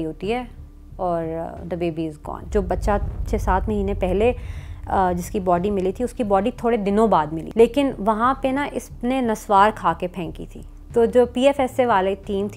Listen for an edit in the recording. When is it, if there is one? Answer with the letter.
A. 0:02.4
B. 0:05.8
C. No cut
A